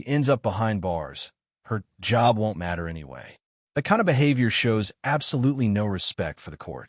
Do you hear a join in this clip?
no; 0 cuts

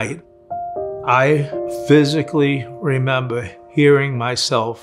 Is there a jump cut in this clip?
yes; 1 cut; at 1.7 s

